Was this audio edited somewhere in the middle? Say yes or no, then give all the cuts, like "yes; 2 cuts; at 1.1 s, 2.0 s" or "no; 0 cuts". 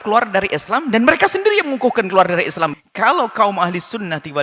yes; 1 cut; at 2.7 s